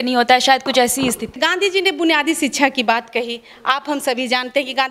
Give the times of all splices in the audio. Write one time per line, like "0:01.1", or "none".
0:01.4